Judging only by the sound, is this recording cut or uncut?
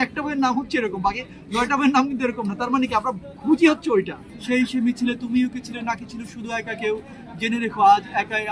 cut